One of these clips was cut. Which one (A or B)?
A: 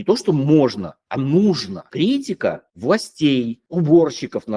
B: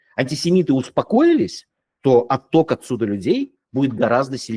A